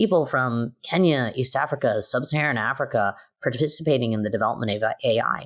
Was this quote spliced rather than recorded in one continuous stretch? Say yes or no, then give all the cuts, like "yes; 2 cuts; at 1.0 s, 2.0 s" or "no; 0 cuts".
no; 0 cuts